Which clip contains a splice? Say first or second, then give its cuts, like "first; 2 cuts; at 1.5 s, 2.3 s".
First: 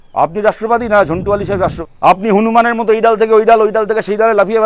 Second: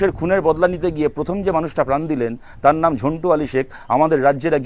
first; 1 cut; at 1.8 s